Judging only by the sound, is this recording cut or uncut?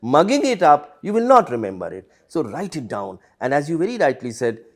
uncut